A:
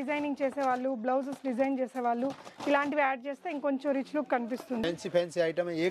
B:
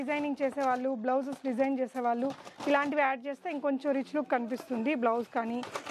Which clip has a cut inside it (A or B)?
A